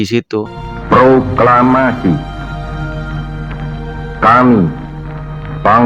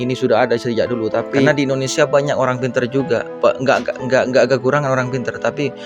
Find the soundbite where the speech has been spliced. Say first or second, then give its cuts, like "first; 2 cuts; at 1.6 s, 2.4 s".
second; 1 cut; at 1.5 s